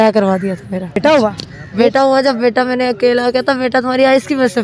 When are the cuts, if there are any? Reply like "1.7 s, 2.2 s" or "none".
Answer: 1.0 s